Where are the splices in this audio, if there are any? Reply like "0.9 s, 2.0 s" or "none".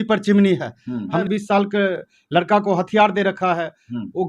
1.2 s